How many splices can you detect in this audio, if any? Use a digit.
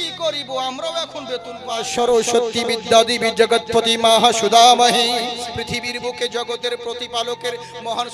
1